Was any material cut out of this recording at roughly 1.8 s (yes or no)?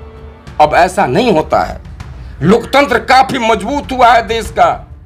no